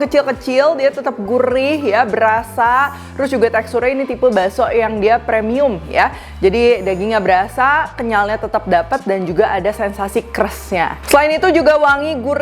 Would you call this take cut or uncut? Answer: uncut